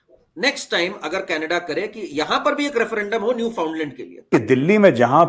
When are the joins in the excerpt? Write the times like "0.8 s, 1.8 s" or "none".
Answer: 4.3 s